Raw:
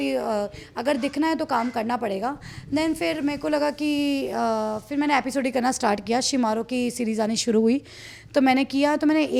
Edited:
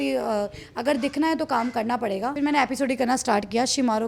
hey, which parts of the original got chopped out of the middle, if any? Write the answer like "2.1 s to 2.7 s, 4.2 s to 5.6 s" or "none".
2.3 s to 4.9 s